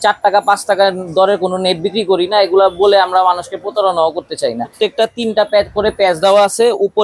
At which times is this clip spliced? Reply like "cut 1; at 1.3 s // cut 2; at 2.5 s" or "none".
cut 1; at 4.7 s